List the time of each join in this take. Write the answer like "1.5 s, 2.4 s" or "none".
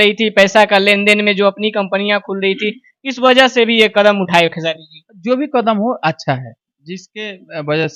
none